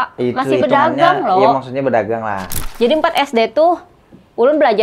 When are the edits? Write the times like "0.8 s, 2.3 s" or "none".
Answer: 2.6 s